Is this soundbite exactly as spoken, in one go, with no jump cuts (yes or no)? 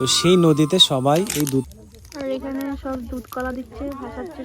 no